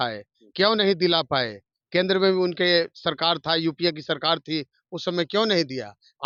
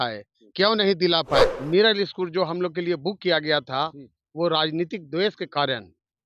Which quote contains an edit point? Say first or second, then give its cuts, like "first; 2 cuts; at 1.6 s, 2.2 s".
second; 1 cut; at 1.5 s